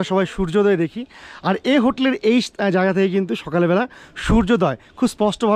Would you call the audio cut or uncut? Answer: uncut